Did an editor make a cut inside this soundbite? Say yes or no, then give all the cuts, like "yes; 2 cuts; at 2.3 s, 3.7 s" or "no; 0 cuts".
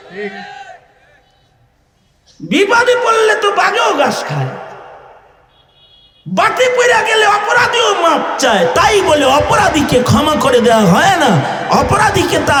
no; 0 cuts